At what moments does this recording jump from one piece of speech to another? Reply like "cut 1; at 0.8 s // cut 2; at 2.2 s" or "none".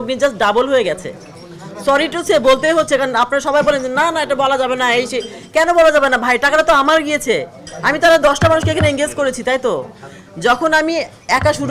none